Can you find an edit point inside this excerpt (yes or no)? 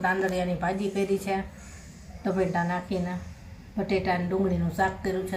no